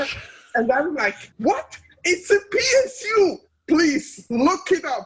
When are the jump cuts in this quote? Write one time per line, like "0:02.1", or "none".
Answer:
0:01.2